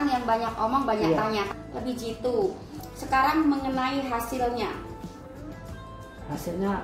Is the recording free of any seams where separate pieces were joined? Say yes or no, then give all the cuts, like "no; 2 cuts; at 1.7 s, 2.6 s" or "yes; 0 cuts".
no; 1 cut; at 1.5 s